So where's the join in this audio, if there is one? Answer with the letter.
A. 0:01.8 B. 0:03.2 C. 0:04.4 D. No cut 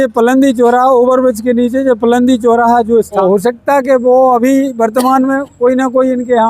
B